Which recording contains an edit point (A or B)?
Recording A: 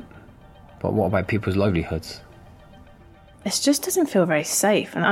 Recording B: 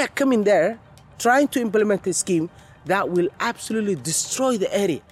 A